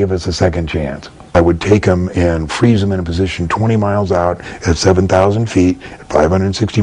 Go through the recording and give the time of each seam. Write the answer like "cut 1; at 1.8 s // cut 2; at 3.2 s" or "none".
cut 1; at 1.3 s